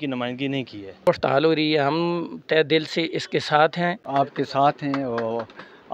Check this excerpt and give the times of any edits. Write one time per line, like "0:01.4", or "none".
0:01.1
0:04.0